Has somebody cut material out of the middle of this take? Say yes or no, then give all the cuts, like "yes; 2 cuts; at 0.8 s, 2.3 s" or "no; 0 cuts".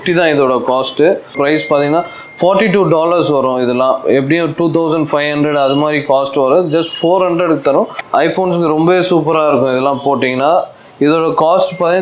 yes; 2 cuts; at 1.3 s, 8.0 s